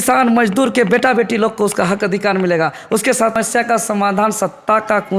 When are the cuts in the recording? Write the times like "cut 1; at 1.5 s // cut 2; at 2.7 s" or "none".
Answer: cut 1; at 3.4 s